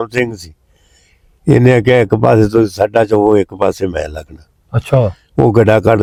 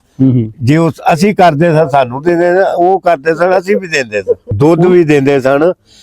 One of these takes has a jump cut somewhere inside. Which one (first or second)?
second